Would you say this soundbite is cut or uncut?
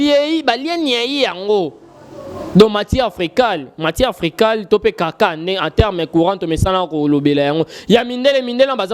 uncut